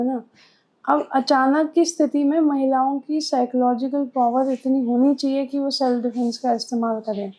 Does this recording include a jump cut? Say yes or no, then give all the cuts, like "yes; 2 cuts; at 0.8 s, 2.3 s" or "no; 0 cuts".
no; 0 cuts